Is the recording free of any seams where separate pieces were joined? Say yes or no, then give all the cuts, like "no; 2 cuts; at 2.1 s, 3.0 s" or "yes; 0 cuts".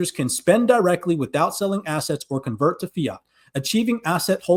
yes; 0 cuts